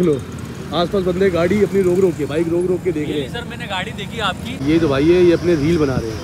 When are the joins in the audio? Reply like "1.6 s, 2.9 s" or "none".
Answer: 4.6 s